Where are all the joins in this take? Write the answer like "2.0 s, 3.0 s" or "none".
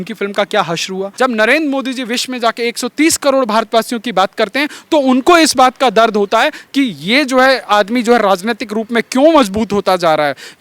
1.1 s